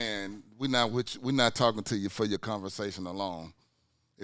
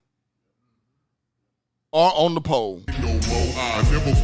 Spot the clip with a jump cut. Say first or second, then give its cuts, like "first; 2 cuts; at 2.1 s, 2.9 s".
second; 1 cut; at 3.1 s